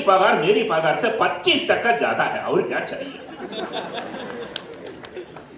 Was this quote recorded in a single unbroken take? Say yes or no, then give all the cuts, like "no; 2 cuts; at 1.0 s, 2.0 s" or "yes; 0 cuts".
yes; 0 cuts